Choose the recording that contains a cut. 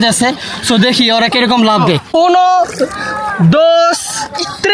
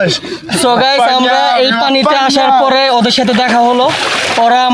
first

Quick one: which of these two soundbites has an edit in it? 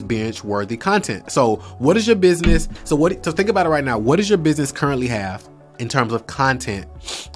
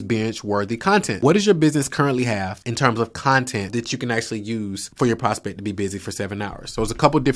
second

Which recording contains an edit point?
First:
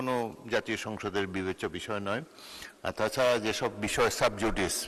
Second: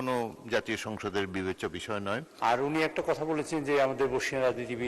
second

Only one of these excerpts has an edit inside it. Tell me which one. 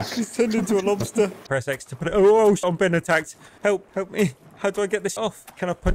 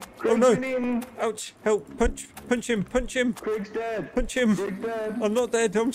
first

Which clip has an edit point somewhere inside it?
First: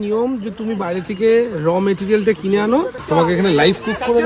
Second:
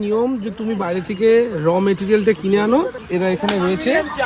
first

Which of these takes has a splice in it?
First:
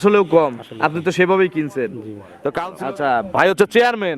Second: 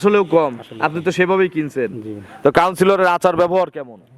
first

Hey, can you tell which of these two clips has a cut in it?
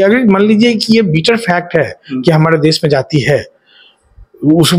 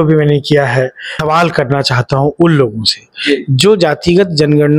second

